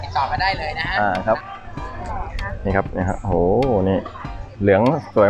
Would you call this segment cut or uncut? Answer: cut